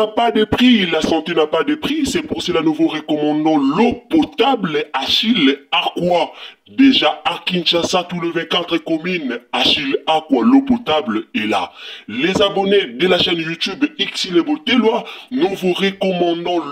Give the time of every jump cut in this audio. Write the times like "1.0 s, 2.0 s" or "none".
none